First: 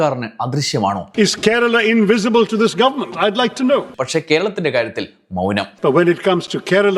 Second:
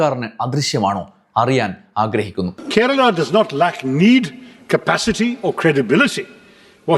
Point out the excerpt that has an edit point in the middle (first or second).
first